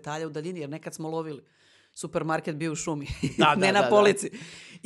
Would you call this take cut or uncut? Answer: uncut